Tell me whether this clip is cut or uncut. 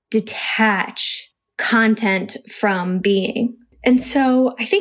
cut